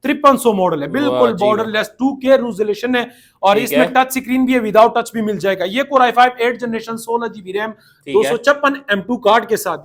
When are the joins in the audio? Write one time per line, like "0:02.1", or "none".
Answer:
none